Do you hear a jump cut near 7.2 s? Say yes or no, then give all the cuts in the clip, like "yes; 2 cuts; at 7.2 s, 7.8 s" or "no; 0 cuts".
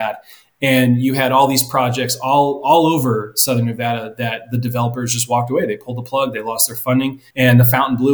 yes; 1 cut; at 7.2 s